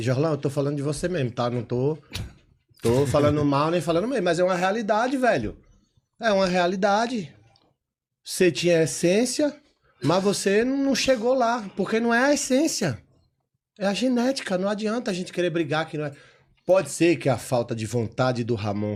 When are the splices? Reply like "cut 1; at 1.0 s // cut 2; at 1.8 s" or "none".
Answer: none